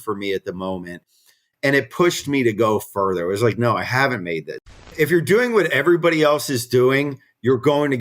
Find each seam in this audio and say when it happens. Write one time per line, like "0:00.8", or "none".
0:04.7